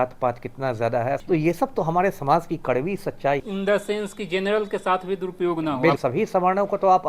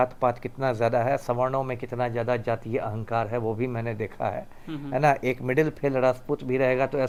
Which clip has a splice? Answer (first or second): first